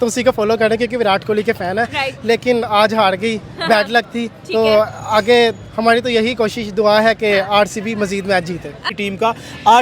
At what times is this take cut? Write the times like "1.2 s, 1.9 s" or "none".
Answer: 8.9 s